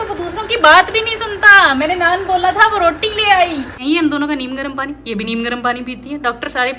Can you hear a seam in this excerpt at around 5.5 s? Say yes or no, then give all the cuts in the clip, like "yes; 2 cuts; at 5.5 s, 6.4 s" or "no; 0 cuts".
no; 1 cut; at 3.7 s